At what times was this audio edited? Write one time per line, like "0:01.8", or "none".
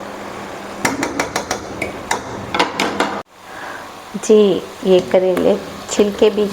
0:03.3